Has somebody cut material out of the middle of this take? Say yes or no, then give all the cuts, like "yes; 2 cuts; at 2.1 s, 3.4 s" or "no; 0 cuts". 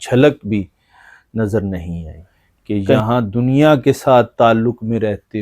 yes; 1 cut; at 3.0 s